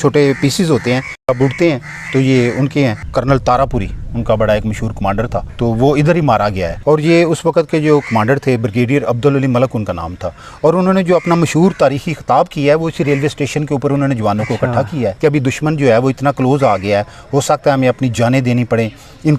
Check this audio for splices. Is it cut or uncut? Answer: cut